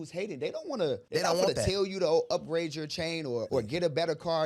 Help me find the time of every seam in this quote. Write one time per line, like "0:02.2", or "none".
0:03.5